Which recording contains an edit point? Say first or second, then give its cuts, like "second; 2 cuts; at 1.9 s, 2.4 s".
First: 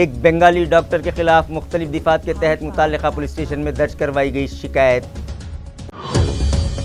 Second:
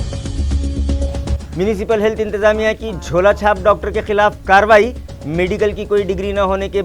second; 1 cut; at 1.1 s